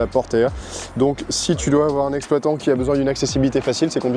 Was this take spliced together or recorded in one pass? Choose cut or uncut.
uncut